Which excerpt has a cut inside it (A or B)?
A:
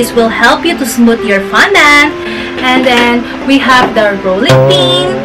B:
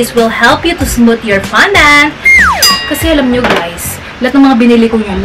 B